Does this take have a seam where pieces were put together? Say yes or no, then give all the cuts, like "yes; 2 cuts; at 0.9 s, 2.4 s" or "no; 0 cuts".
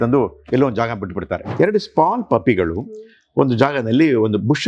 yes; 1 cut; at 1.4 s